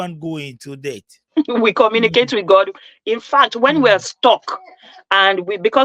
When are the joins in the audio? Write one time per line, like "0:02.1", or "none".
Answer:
0:01.2